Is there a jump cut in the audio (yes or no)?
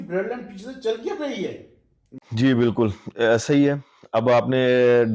no